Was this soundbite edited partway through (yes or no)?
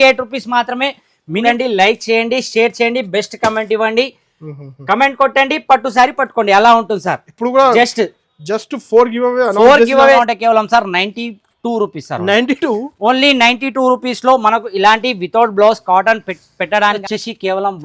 yes